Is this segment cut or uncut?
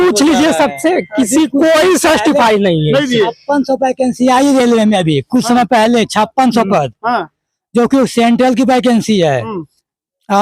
uncut